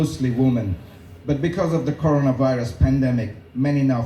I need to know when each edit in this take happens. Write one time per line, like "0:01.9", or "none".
none